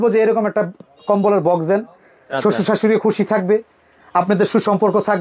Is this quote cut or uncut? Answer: uncut